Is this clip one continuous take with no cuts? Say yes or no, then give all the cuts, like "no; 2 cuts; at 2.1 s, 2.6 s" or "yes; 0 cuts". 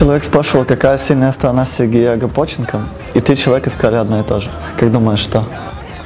yes; 0 cuts